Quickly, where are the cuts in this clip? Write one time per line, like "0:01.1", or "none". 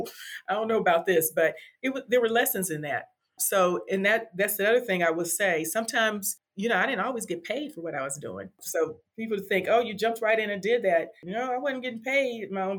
none